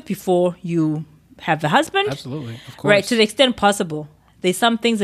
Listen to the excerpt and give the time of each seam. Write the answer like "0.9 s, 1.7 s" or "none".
none